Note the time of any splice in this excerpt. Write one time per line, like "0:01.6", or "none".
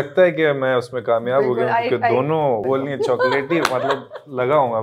0:02.6